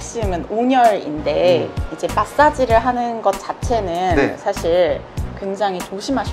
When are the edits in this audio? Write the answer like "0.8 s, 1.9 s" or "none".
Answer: none